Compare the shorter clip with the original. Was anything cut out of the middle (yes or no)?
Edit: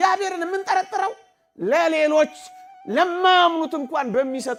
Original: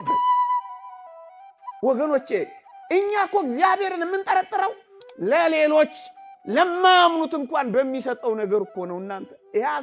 no